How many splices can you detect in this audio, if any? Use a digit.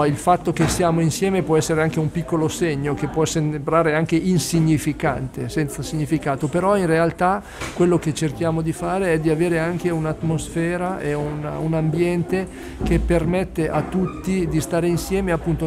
0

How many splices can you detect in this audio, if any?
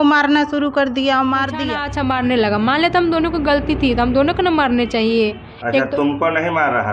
1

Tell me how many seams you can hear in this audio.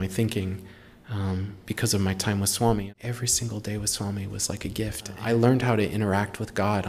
2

